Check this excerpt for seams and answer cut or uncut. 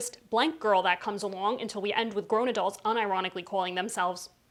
uncut